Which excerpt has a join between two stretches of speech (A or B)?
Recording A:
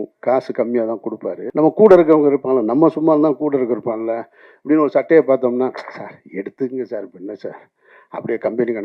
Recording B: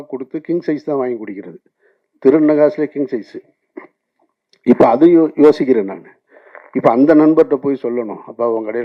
A